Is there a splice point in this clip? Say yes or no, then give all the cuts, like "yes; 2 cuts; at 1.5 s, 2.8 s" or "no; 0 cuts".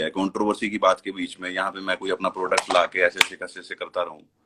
no; 0 cuts